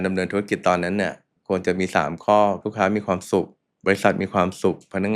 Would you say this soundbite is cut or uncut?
cut